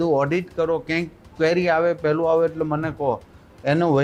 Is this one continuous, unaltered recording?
yes; 0 cuts

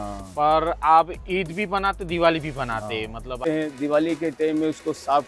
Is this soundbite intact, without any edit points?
no; 1 cut; at 3.4 s

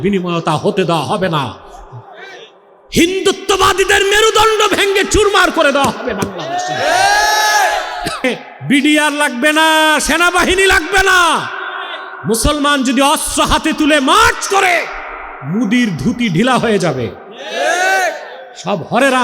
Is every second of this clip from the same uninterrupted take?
no; 1 cut; at 8.2 s

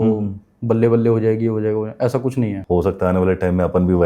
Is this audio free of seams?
no; 1 cut; at 2.6 s

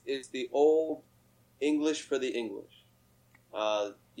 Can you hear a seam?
no; 0 cuts

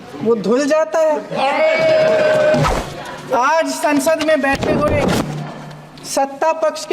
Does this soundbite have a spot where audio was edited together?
yes; 1 cut; at 2.7 s

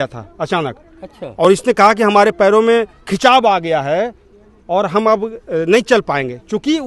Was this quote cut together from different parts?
no; 0 cuts

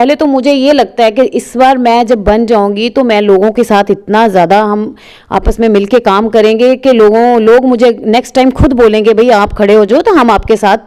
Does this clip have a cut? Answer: no; 0 cuts

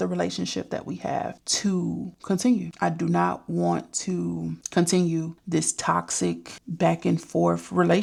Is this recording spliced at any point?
no; 0 cuts

